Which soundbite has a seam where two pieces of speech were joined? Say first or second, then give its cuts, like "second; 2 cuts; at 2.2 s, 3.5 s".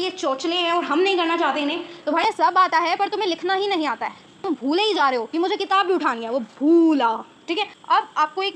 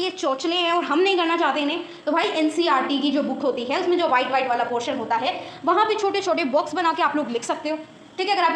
first; 3 cuts; at 2.2 s, 4.5 s, 7.7 s